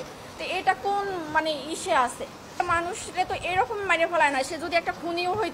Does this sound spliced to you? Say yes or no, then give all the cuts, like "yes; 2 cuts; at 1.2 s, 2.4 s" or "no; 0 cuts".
yes; 1 cut; at 2.5 s